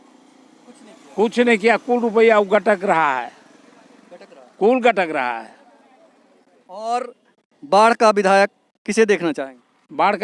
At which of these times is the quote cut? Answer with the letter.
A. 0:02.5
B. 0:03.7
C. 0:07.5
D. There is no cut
D